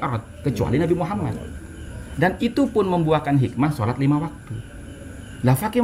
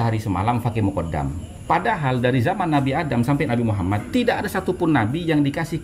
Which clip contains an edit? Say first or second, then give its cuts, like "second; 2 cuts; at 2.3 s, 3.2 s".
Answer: second; 1 cut; at 1.5 s